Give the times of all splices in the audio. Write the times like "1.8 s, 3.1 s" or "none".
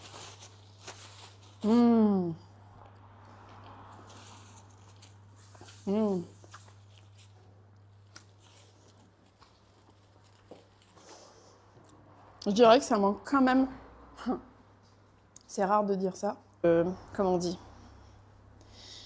16.6 s

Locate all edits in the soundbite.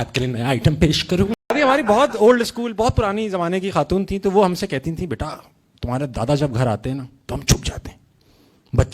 1.4 s

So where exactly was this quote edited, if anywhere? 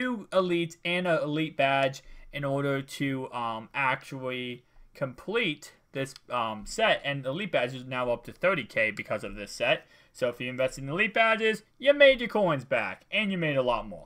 4.9 s

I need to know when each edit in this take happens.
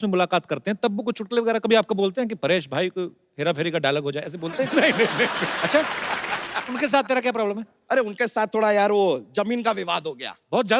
6.5 s

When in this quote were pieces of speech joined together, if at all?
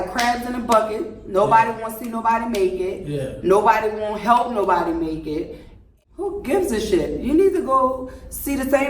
5.8 s

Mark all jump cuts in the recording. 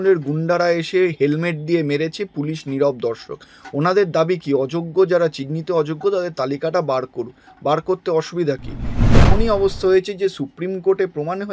9.2 s

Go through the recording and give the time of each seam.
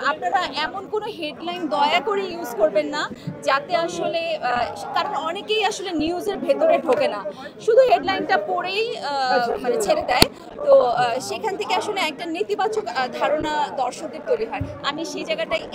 none

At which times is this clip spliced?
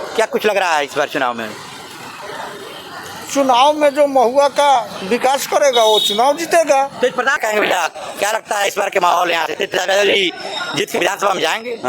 7.4 s

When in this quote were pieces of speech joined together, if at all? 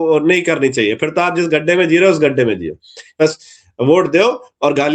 3.2 s

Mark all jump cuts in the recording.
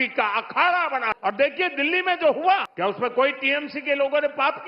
1.1 s, 2.7 s

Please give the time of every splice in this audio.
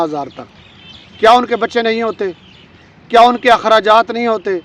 none

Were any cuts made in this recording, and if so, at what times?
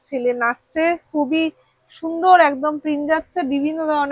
none

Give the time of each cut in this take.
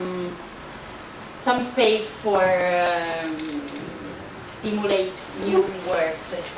2.1 s

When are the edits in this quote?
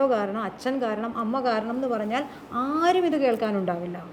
none

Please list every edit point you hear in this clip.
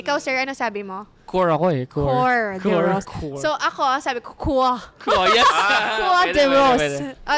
none

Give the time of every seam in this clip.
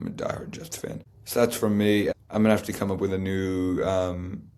1.1 s, 2.1 s

